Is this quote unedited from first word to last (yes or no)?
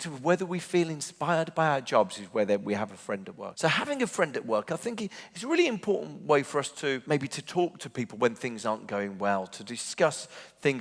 no